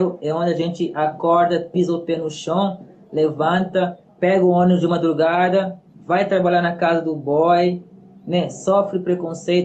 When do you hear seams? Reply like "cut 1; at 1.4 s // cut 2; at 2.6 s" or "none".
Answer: cut 1; at 4.0 s

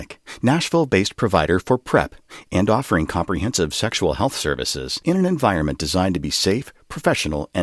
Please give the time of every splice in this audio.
none

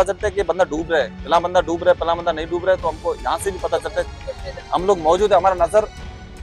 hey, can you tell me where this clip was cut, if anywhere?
none

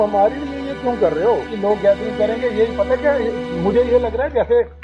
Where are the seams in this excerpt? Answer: cut 1; at 1.5 s

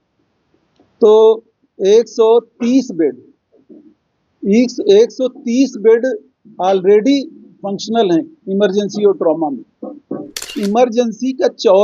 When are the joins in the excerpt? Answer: cut 1; at 10.5 s

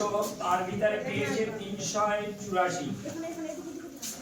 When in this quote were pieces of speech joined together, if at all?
none

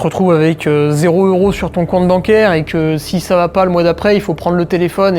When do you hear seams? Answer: none

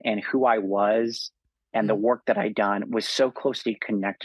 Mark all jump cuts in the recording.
none

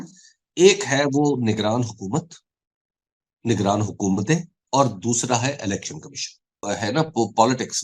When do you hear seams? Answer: cut 1; at 6.6 s

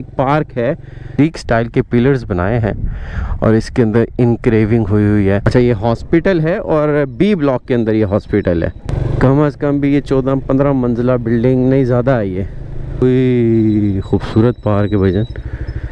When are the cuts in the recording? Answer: cut 1; at 1.2 s // cut 2; at 5.4 s // cut 3; at 8.9 s // cut 4; at 13.0 s

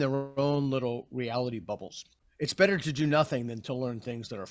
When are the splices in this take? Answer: cut 1; at 2.2 s

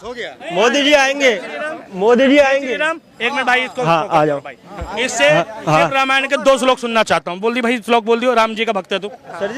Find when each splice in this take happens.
none

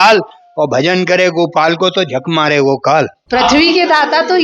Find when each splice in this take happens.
cut 1; at 3.2 s

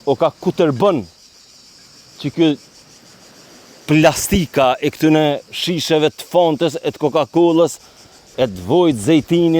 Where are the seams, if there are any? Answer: none

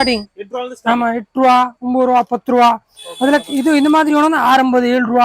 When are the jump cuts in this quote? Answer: none

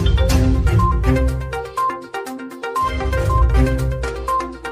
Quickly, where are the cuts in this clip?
cut 1; at 1.9 s // cut 2; at 3.5 s

